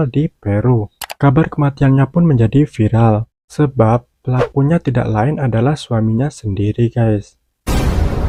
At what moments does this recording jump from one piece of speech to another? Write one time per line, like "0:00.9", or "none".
none